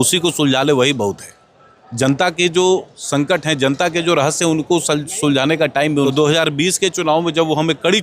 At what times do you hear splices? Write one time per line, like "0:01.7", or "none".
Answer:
0:06.1

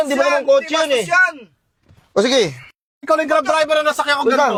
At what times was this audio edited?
none

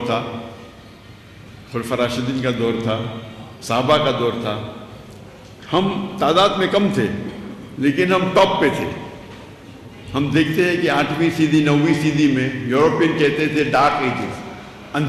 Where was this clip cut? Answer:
none

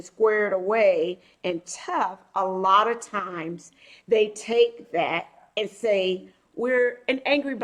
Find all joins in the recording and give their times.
none

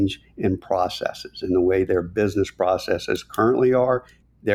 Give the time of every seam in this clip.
none

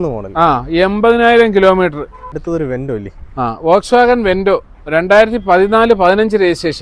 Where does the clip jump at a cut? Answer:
0:02.3

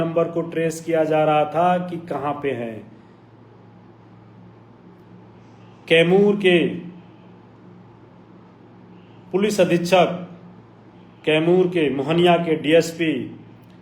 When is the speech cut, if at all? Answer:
none

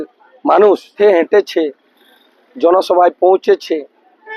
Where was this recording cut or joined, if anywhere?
0:00.9

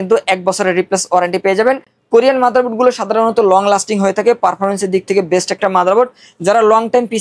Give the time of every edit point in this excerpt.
none

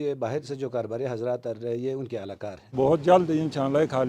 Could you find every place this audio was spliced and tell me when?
0:02.7

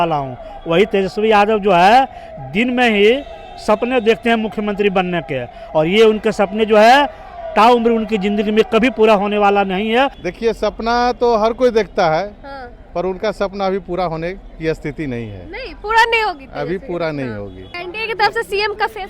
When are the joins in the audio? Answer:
0:10.2
0:17.8

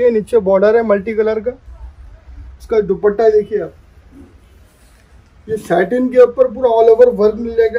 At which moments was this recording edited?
none

